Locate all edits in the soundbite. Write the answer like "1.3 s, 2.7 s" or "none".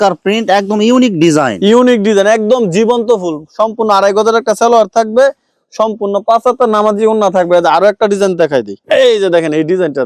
none